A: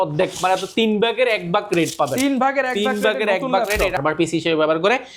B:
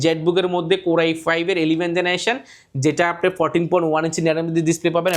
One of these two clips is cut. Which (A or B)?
A